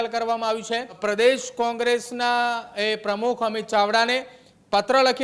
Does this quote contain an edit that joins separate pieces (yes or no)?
yes